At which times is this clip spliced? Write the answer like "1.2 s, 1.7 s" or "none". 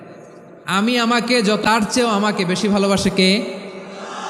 1.6 s